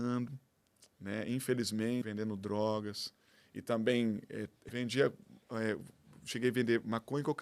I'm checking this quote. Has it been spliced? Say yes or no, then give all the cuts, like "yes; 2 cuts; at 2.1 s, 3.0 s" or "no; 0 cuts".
yes; 2 cuts; at 2.0 s, 4.7 s